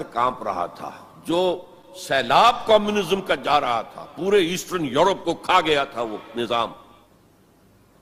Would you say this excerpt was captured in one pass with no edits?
yes; 0 cuts

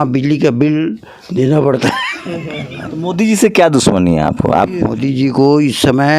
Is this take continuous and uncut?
no; 2 cuts; at 3.0 s, 5.0 s

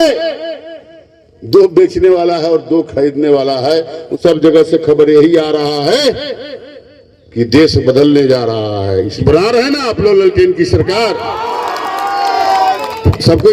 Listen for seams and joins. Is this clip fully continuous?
no; 2 cuts; at 4.0 s, 9.2 s

